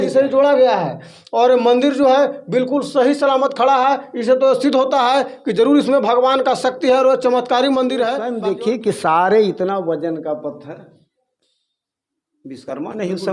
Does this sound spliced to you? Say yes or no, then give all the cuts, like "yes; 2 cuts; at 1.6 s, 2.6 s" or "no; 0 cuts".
yes; 1 cut; at 8.3 s